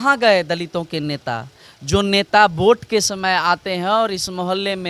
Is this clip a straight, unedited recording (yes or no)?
yes